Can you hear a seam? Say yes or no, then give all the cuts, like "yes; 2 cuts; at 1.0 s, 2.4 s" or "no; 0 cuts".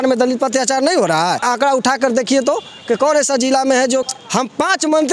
yes; 2 cuts; at 1.4 s, 4.1 s